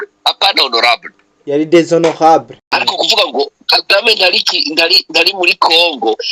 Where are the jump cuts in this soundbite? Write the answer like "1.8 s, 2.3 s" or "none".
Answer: 2.7 s